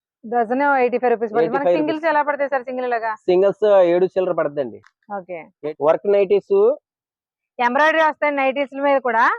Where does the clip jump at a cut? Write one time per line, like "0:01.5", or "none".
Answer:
0:05.6